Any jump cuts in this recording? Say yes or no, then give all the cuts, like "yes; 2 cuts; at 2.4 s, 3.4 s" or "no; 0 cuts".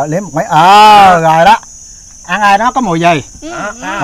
no; 0 cuts